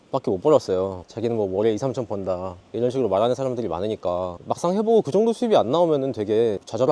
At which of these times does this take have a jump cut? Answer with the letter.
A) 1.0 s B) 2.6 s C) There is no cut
A